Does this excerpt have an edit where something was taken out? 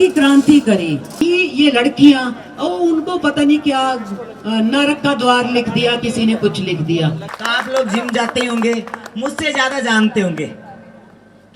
yes; 2 cuts; at 1.0 s, 7.4 s

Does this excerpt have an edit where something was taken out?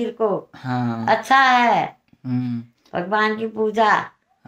no; 0 cuts

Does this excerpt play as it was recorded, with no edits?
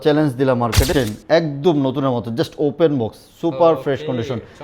no; 1 cut; at 0.9 s

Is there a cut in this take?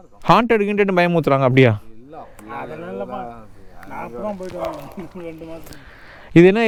no; 0 cuts

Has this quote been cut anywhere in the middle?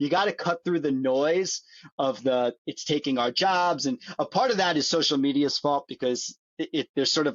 no; 0 cuts

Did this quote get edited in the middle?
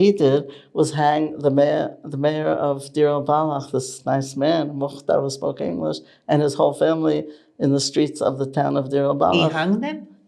no; 0 cuts

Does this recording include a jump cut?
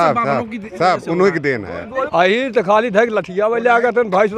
yes; 1 cut; at 2.0 s

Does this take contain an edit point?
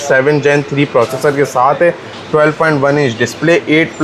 no; 0 cuts

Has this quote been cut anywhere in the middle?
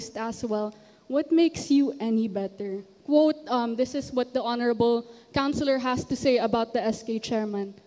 no; 0 cuts

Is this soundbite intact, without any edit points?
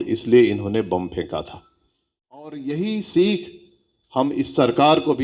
no; 1 cut; at 2.6 s

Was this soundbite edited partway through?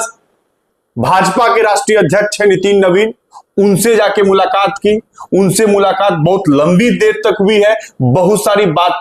no; 0 cuts

